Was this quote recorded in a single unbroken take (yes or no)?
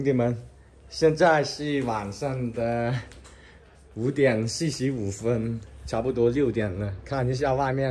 yes